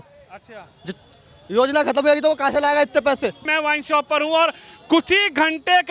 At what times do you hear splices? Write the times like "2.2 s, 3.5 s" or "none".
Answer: 3.4 s